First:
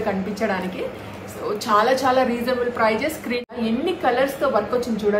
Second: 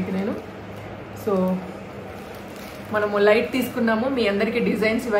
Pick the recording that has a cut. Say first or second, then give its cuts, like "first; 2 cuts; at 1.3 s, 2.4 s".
first; 1 cut; at 3.5 s